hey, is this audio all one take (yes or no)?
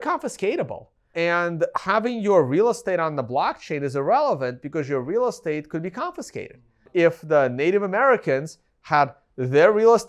no